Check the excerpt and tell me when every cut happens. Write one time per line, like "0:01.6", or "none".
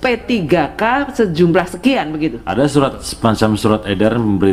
0:02.4